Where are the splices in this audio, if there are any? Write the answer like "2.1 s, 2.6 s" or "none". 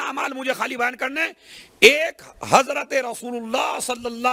none